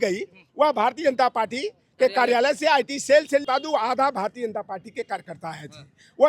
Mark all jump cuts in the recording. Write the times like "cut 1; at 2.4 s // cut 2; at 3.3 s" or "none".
cut 1; at 3.5 s